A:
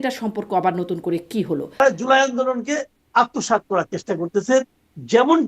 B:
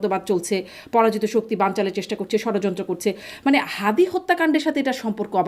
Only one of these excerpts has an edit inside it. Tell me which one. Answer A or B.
A